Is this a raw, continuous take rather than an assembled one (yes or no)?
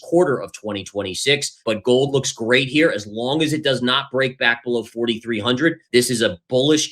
no